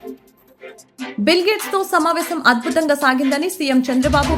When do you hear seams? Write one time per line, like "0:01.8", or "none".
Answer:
0:01.1